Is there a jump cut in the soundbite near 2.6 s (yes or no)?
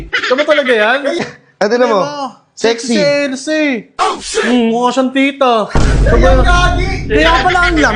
no